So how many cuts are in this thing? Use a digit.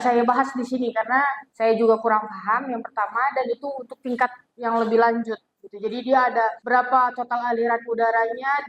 2